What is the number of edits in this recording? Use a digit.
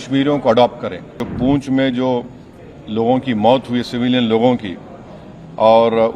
1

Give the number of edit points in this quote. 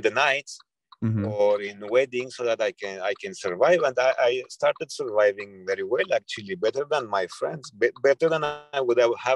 0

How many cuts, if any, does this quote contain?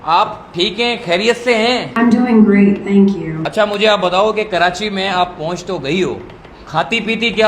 2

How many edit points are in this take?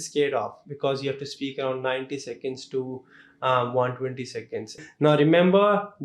1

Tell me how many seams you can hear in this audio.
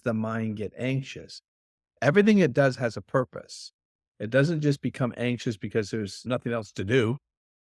1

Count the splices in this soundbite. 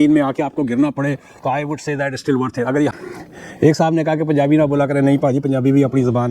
1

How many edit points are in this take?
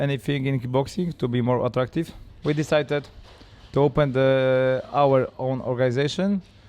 1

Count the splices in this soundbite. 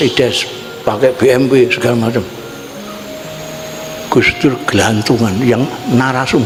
0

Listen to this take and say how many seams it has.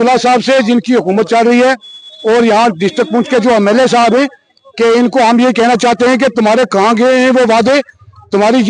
0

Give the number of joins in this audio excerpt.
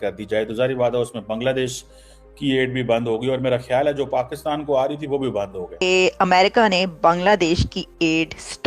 1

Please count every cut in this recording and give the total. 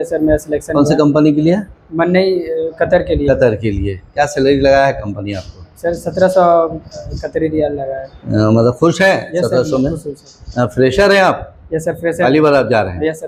0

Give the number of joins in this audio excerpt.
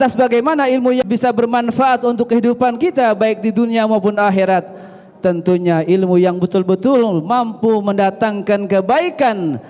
1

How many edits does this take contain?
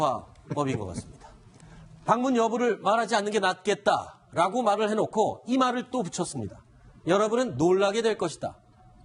1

